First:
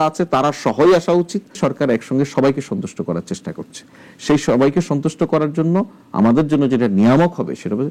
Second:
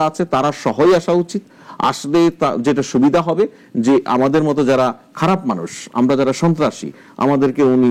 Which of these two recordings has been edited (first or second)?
first